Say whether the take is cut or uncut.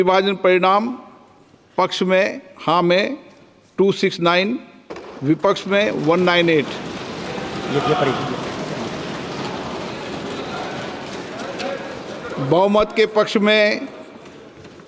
uncut